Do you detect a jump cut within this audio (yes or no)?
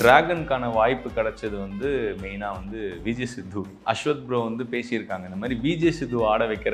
yes